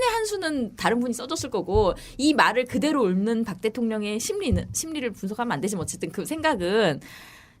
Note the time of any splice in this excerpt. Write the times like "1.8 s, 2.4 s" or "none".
4.0 s